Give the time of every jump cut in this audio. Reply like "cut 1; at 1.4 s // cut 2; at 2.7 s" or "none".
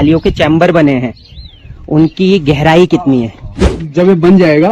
cut 1; at 3.8 s